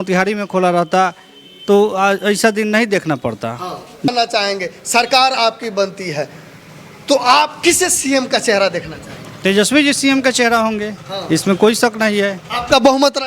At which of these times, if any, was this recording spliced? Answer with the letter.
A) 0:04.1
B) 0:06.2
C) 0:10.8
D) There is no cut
A